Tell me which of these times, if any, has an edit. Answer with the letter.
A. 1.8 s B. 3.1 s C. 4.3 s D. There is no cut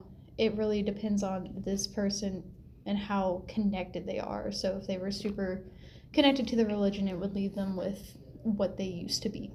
D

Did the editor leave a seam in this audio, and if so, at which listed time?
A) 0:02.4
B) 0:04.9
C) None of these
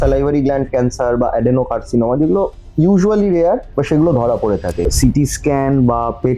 B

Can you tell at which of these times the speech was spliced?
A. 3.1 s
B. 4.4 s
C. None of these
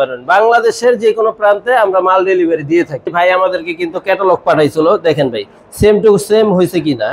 A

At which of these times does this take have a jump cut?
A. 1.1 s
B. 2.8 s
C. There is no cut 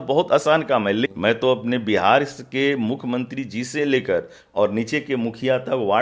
A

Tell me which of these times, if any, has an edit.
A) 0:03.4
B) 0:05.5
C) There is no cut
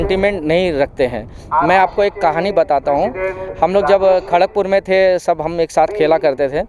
C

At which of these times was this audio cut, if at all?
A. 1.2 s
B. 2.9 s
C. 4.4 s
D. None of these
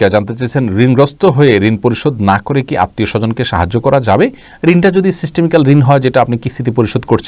D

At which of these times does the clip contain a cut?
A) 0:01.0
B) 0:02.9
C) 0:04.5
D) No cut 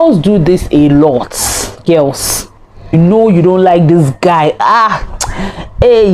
B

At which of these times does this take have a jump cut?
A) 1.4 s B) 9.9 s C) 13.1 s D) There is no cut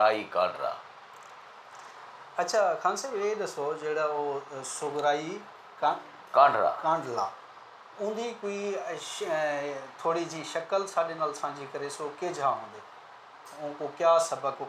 A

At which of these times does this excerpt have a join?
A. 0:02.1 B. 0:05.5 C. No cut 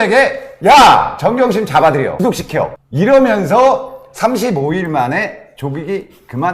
A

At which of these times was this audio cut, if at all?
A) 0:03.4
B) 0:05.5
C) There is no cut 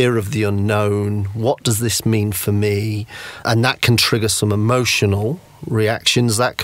A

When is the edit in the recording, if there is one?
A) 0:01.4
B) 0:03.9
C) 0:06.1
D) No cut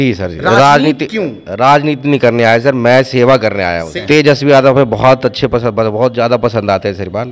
B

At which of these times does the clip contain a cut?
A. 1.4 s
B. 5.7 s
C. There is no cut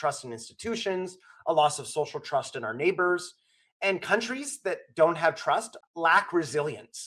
B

